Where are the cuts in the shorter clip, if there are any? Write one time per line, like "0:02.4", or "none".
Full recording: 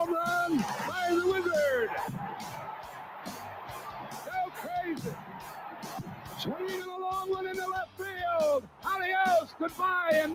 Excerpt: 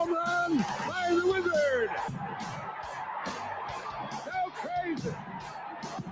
none